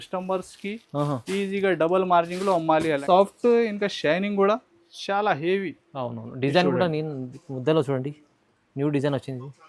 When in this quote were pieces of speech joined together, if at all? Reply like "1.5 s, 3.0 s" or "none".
3.0 s